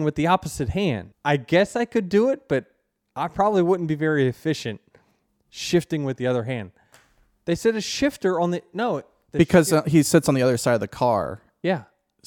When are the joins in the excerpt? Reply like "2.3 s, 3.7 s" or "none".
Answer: 1.1 s